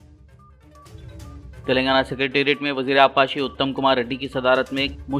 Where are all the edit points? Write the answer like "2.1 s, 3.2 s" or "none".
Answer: 1.2 s

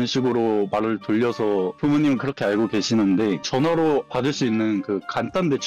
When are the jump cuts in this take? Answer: 3.4 s

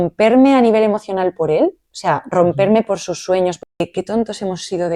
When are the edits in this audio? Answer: 3.9 s

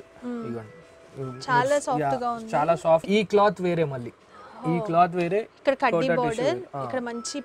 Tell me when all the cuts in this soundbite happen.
3.0 s

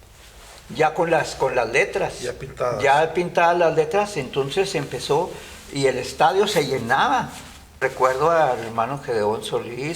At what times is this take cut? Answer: 7.8 s

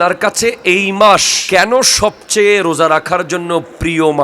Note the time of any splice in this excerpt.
1.3 s

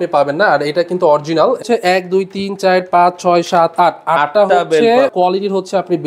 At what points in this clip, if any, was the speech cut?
1.6 s, 5.1 s

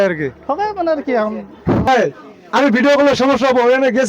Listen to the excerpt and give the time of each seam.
1.9 s

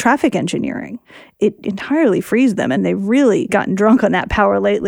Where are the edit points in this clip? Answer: 1.4 s, 2.8 s, 3.5 s

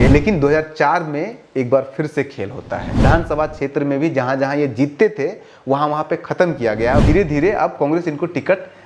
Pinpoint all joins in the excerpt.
3.0 s, 7.0 s

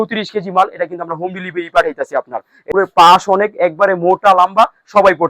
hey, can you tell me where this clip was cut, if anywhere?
2.7 s

